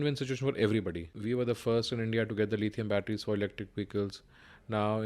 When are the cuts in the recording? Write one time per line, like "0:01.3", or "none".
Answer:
0:01.1